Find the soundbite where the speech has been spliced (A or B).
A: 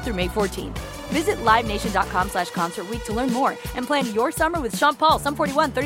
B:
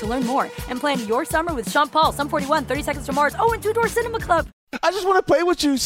B